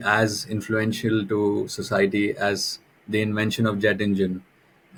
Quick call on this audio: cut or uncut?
uncut